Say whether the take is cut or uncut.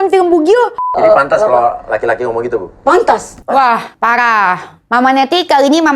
cut